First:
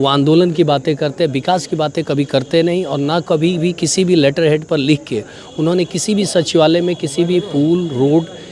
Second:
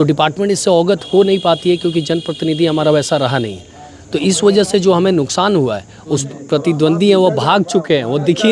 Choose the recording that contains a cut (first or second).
second